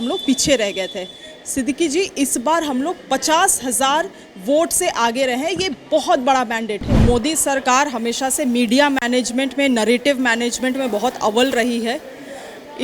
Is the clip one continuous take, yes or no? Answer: no